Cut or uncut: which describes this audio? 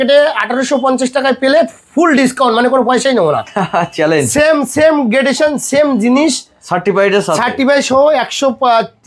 uncut